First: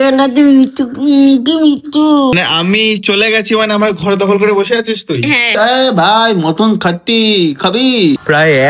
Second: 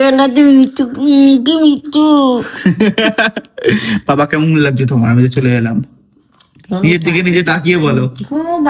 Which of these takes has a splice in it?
first; 2 cuts; at 2.3 s, 5.4 s

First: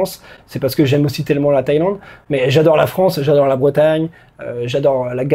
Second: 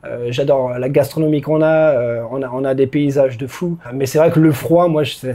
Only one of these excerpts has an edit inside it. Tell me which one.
second; 1 cut; at 3.9 s

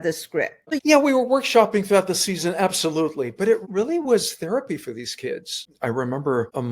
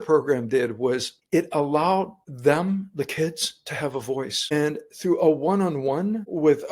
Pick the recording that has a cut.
first; 1 cut; at 5.6 s

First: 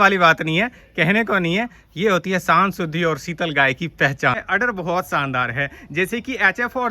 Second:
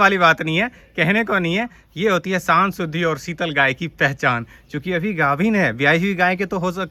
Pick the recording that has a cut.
first; 1 cut; at 4.4 s

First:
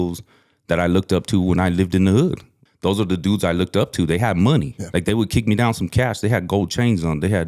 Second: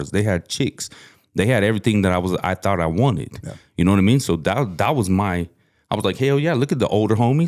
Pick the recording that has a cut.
first; 2 cuts; at 2.6 s, 4.8 s

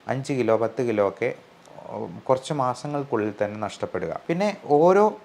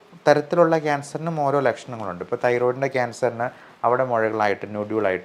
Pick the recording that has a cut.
first; 1 cut; at 4.2 s

